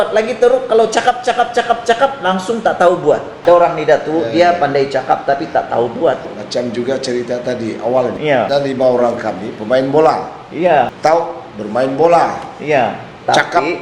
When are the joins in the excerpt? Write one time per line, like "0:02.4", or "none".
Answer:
0:03.3
0:06.3
0:08.3
0:10.9